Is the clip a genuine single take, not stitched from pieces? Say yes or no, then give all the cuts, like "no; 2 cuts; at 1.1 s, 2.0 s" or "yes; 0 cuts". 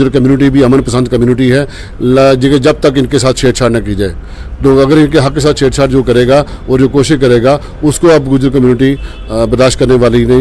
yes; 0 cuts